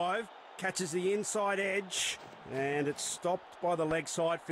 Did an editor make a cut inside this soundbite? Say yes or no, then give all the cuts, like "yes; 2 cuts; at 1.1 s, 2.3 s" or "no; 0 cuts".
no; 0 cuts